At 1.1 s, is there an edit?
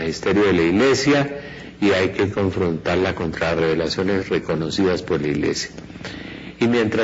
no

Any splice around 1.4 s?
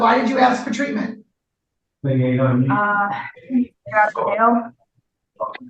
no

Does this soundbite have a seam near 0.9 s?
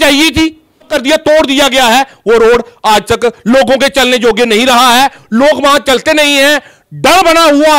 yes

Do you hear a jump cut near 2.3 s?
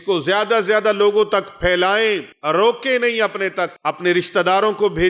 yes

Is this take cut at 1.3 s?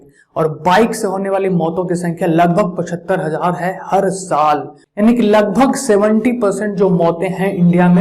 no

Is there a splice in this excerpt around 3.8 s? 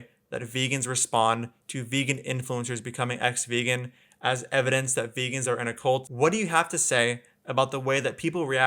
no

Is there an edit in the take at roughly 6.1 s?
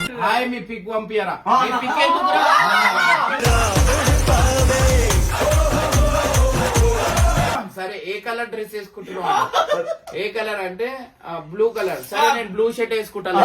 no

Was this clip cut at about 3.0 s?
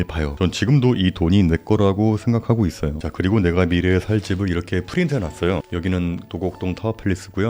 yes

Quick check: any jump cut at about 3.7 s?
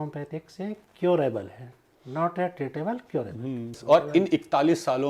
yes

